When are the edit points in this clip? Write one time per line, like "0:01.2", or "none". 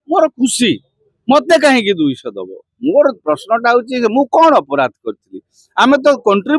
none